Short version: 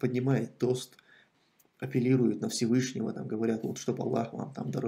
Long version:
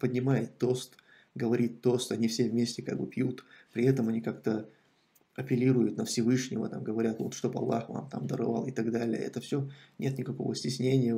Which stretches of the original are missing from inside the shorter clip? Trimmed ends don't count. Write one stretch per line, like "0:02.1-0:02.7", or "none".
0:01.2-0:04.8